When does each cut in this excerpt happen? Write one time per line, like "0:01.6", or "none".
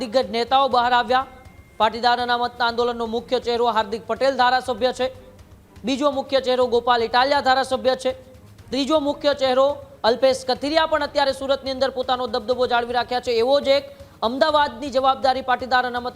none